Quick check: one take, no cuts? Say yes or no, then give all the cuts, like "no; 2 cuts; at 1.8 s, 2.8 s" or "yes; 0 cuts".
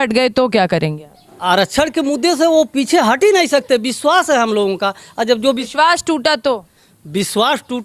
yes; 0 cuts